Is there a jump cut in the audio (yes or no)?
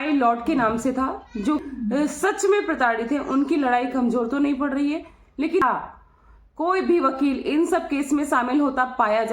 yes